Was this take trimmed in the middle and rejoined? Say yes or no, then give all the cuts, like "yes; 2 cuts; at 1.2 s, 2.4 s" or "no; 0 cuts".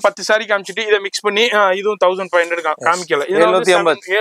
no; 0 cuts